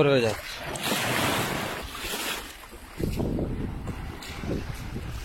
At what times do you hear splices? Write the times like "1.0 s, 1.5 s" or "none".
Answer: none